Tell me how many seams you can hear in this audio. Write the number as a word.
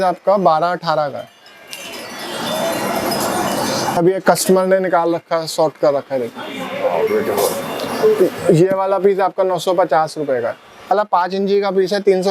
two